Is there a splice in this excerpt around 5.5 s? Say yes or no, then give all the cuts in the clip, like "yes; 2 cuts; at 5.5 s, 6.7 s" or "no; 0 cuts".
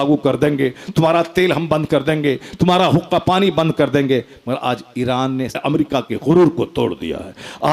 yes; 1 cut; at 5.5 s